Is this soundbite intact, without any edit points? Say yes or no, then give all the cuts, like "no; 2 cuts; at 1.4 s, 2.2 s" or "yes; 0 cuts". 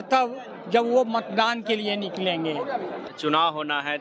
no; 1 cut; at 3.1 s